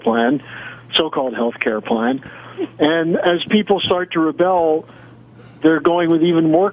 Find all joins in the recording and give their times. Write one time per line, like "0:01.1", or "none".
none